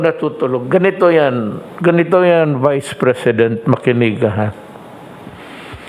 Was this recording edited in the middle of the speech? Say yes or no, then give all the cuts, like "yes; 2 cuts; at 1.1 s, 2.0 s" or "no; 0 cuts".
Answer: no; 0 cuts